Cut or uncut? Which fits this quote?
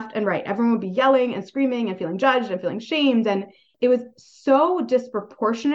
cut